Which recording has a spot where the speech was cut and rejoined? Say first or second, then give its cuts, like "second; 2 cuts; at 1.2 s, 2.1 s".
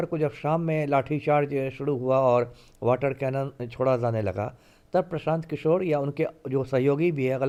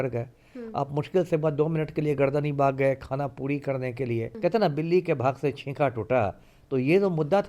second; 1 cut; at 4.3 s